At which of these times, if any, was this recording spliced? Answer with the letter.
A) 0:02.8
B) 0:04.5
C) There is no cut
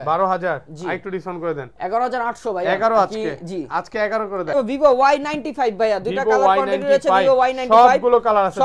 B